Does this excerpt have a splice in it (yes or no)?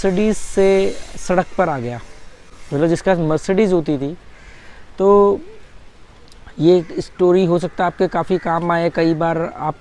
no